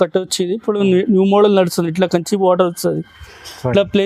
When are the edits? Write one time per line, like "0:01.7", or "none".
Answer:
none